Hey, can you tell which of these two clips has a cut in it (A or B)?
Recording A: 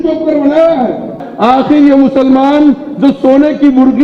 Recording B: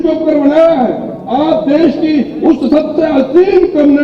A